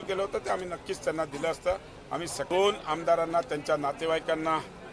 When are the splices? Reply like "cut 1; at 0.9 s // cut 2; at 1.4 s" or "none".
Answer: cut 1; at 2.5 s